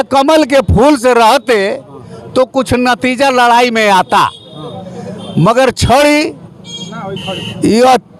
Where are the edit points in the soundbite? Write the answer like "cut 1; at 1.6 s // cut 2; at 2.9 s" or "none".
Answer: none

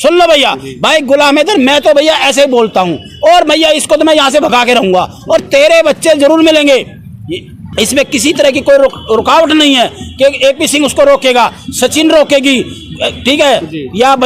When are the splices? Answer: cut 1; at 7.7 s

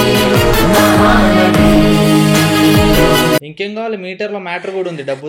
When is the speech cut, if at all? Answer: cut 1; at 3.5 s

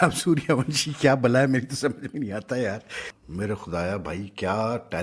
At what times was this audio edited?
cut 1; at 3.1 s

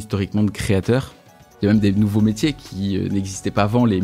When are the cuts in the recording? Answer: cut 1; at 1.5 s

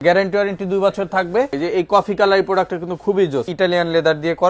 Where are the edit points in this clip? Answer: cut 1; at 1.5 s // cut 2; at 3.5 s

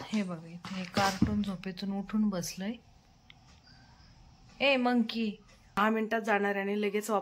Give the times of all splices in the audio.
cut 1; at 5.8 s

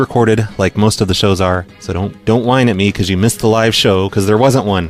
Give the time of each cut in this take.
none

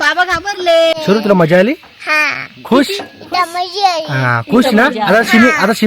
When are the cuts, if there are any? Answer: cut 1; at 1.0 s

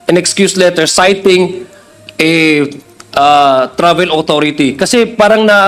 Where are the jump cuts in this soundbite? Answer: none

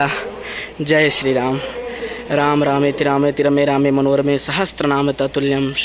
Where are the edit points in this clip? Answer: none

